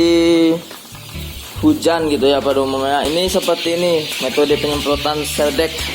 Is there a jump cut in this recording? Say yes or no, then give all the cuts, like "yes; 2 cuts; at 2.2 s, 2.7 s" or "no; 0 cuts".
yes; 1 cut; at 3.1 s